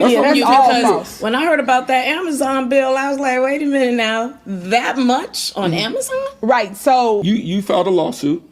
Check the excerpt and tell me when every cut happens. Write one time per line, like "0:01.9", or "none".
0:07.2